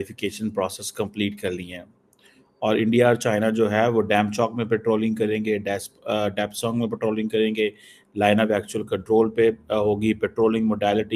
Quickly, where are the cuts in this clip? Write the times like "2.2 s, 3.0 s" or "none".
none